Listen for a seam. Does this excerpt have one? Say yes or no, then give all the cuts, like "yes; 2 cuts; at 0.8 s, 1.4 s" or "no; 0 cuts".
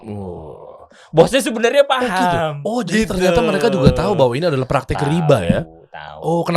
no; 0 cuts